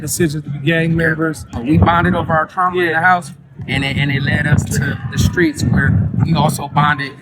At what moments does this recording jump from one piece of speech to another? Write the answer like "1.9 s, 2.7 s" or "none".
1.6 s, 6.3 s